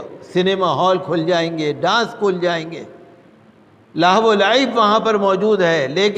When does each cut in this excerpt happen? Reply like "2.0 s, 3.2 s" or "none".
none